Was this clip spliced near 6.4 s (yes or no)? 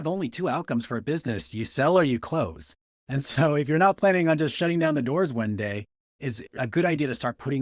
yes